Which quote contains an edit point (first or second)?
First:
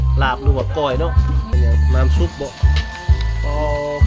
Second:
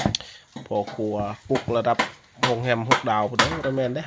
first